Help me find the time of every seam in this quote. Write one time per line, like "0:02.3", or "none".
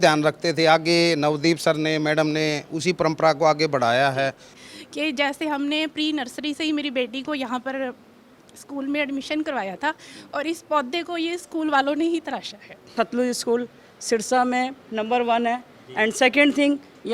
0:04.5
0:12.9